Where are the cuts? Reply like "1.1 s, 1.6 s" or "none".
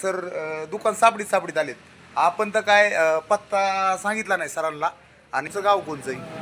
5.5 s